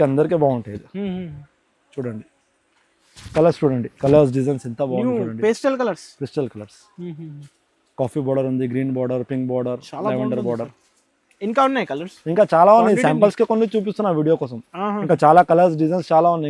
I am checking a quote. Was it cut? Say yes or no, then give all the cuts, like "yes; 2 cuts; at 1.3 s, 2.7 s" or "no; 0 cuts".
no; 0 cuts